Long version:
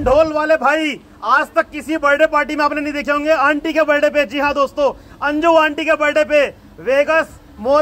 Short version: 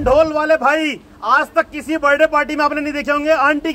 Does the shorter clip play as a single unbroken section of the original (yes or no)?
yes